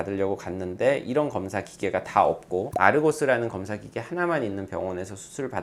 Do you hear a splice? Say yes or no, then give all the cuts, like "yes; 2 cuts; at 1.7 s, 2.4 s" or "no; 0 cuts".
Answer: no; 0 cuts